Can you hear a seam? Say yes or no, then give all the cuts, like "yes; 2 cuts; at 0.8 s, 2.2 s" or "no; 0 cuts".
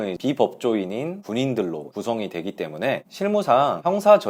no; 0 cuts